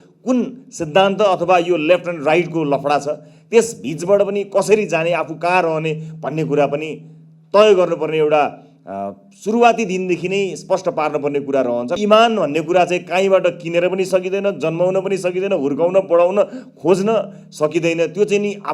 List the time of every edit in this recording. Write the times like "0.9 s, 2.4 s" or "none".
12.0 s